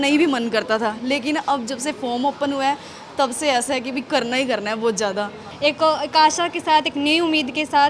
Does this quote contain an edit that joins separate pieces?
yes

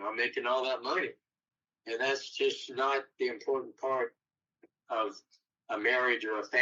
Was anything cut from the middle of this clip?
no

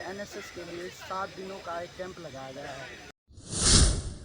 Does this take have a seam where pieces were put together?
yes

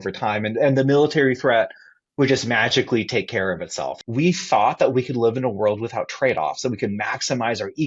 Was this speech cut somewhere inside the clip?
yes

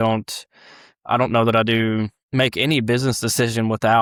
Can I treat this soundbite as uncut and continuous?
yes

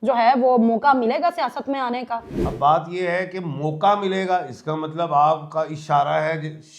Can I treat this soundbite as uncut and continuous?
no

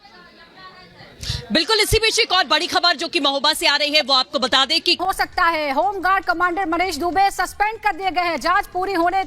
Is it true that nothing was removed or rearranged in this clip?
no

